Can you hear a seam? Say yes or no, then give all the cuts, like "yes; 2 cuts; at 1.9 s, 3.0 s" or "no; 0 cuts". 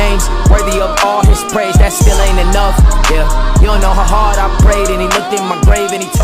no; 0 cuts